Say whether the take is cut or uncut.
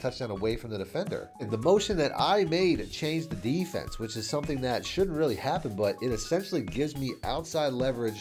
cut